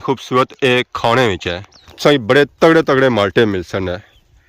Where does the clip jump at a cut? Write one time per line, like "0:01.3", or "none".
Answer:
0:01.8